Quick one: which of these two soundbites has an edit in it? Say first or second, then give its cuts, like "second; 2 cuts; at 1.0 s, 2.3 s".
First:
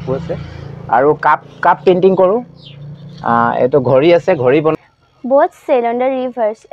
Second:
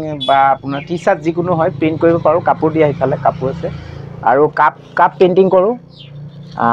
first; 1 cut; at 4.8 s